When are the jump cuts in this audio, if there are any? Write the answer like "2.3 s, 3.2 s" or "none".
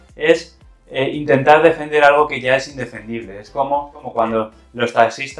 4.1 s